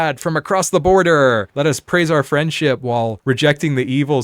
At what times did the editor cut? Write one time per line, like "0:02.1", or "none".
0:01.5
0:03.2